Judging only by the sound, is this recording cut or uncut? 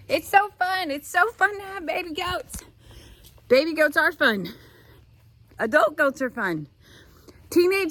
uncut